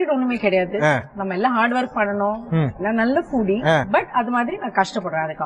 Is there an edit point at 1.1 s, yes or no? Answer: yes